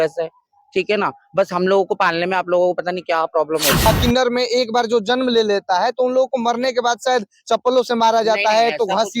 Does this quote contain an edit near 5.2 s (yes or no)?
no